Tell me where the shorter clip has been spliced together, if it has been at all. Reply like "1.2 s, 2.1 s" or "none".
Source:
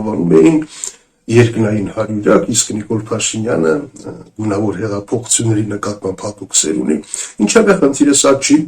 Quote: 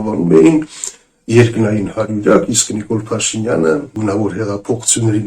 3.9 s